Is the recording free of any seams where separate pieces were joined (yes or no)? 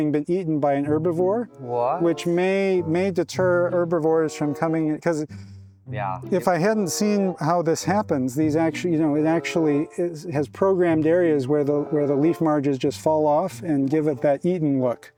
yes